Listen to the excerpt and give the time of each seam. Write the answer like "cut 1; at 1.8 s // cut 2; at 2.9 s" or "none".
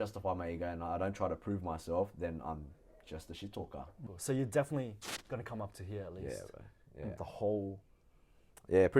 cut 1; at 4.1 s